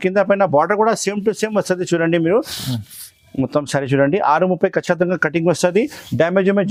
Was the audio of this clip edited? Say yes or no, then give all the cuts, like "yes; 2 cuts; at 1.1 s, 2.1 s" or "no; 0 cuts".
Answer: no; 0 cuts